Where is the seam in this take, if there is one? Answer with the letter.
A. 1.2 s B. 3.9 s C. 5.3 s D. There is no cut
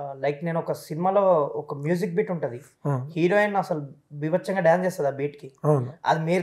D